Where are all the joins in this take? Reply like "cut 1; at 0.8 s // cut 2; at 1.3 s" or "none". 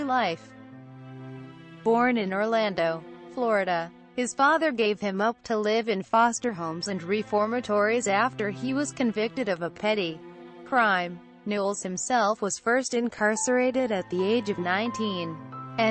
cut 1; at 7.3 s